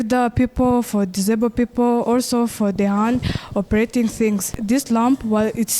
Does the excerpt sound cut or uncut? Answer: cut